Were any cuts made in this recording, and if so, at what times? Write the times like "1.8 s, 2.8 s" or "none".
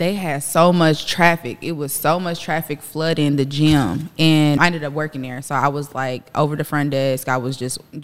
4.6 s